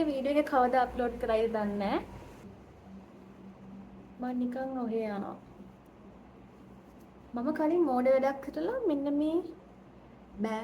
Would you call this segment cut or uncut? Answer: cut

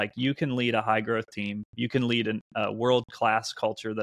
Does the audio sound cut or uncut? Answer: uncut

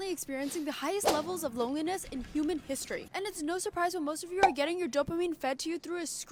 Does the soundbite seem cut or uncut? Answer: uncut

